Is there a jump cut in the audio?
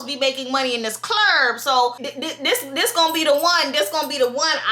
yes; 1 cut; at 2.1 s

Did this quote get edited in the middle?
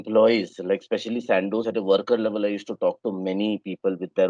no; 0 cuts

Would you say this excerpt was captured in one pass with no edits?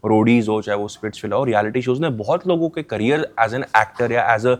yes; 0 cuts

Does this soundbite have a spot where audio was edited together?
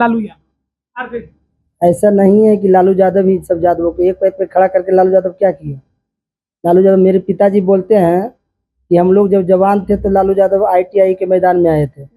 no; 0 cuts

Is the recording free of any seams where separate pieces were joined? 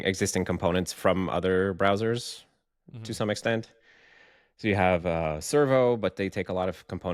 yes; 0 cuts

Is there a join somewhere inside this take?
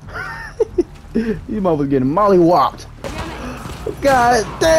yes; 1 cut; at 3.2 s

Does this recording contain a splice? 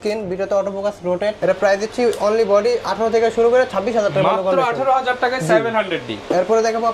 no; 0 cuts

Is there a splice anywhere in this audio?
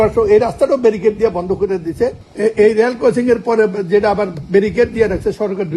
yes; 1 cut; at 2.2 s

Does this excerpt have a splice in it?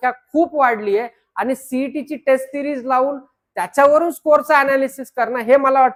no; 0 cuts

